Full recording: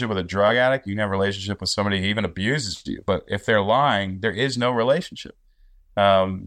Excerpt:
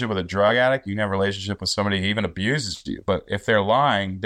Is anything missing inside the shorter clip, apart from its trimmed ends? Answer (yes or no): no